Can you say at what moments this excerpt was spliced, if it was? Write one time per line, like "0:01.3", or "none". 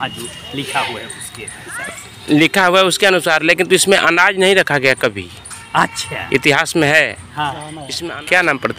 0:07.8